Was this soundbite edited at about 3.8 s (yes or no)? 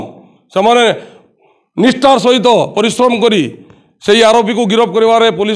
no